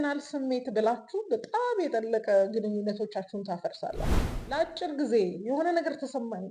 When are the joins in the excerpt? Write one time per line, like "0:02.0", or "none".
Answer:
0:04.2